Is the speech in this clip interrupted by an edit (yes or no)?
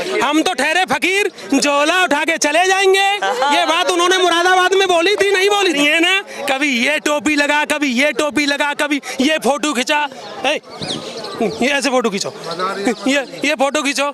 yes